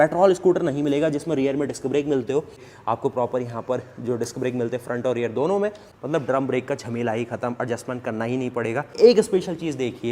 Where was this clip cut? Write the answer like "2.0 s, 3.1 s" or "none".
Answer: 2.7 s, 9.0 s

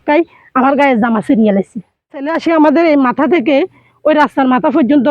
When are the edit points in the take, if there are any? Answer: 2.3 s

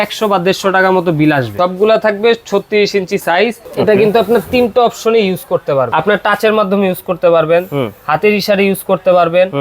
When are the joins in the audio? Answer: 1.5 s, 3.7 s, 5.9 s

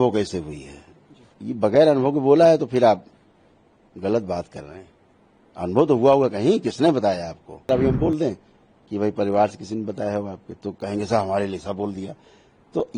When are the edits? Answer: 7.7 s

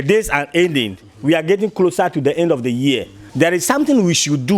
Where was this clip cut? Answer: 3.2 s

